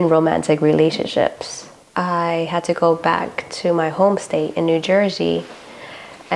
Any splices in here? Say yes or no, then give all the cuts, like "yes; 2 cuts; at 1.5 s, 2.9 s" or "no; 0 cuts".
yes; 1 cut; at 1.8 s